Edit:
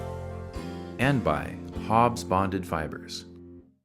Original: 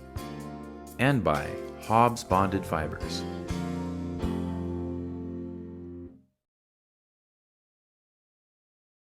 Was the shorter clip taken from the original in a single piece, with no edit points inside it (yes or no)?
no